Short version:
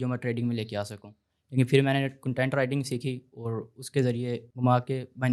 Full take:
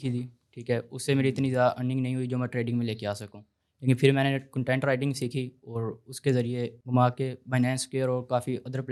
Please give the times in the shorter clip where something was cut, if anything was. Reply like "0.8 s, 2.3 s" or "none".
none